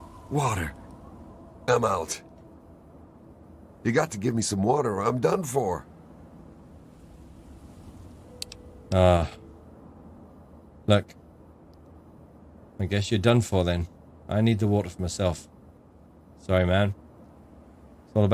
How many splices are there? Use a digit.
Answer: 0